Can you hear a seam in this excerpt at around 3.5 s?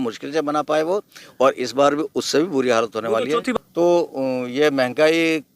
yes; 1 cut; at 3.5 s

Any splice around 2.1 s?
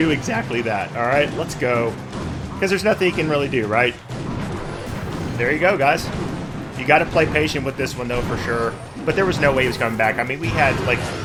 no; 0 cuts

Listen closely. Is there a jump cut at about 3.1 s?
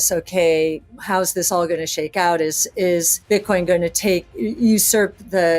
yes; 2 cuts; at 0.9 s, 3.1 s

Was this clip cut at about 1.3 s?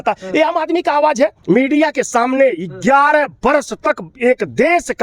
yes; 1 cut; at 1.3 s

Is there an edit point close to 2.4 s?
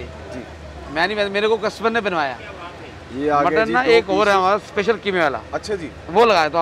yes; 1 cut; at 2.4 s

